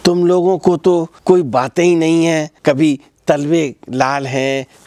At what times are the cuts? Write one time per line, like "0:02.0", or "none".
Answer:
0:01.1
0:02.5

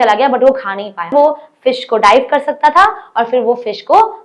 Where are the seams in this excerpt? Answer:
0:01.1

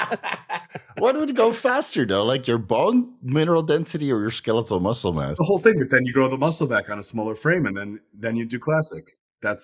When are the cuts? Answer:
none

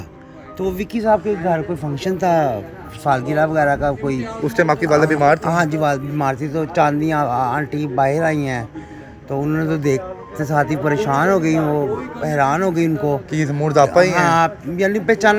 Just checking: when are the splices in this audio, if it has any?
none

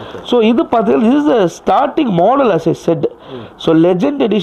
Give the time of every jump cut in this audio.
none

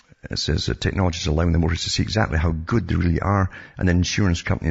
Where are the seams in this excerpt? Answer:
0:00.9

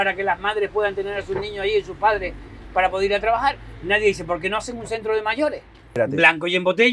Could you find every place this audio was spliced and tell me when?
0:06.0

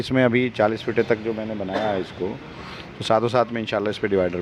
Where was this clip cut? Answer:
none

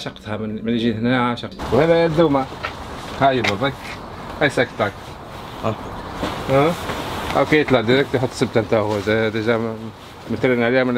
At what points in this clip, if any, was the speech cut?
0:01.5

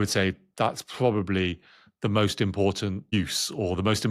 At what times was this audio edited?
0:03.1

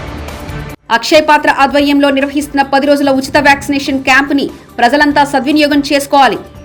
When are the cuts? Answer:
none

